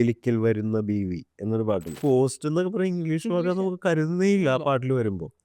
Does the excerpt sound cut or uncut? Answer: cut